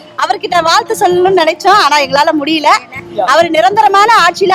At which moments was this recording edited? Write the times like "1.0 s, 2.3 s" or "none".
3.0 s